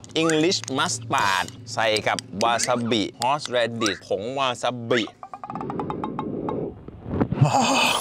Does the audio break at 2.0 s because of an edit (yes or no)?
no